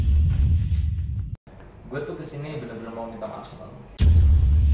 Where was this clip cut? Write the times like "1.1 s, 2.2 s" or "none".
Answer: 1.3 s

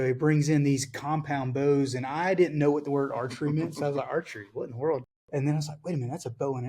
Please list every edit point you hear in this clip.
5.2 s

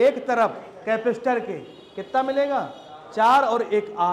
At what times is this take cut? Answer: none

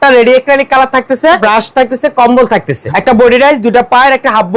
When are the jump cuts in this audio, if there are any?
1.4 s, 2.8 s

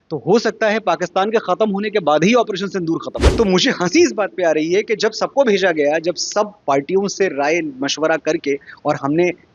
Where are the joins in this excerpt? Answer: 3.2 s

